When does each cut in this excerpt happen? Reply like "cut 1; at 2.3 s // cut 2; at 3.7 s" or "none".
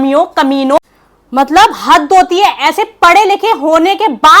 cut 1; at 1.0 s